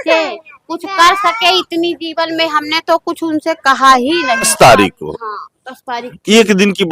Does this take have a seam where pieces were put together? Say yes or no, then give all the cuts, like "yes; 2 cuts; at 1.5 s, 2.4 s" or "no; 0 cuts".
yes; 1 cut; at 4.5 s